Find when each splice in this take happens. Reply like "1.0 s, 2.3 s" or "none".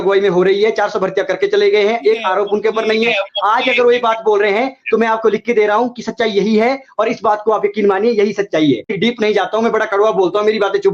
9.0 s